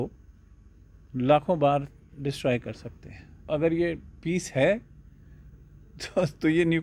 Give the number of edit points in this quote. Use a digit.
1